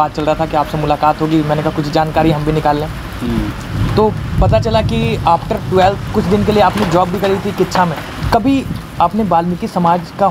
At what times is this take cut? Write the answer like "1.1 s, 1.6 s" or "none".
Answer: 8.1 s